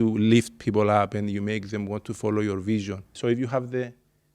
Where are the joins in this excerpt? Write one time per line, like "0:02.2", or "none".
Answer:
0:03.1